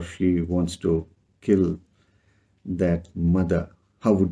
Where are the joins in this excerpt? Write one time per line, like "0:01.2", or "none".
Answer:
none